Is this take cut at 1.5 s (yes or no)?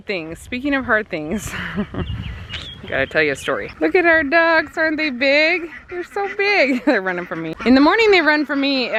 no